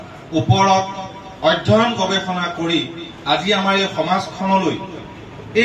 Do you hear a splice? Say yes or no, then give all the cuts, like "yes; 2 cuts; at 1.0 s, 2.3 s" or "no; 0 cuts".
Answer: no; 0 cuts